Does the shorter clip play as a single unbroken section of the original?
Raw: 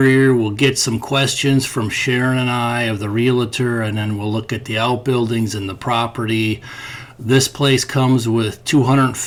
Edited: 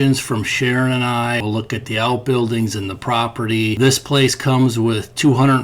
no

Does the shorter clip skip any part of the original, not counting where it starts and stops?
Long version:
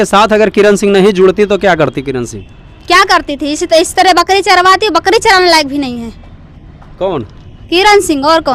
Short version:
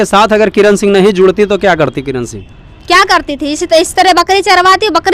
no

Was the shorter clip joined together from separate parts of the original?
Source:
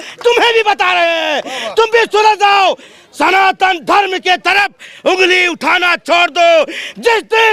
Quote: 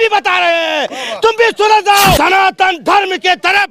yes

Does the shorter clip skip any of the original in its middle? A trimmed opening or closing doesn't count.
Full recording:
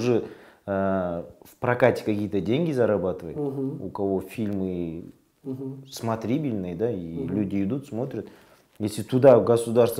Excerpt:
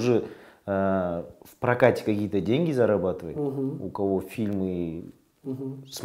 no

